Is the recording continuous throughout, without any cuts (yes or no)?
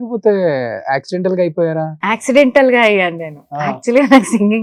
yes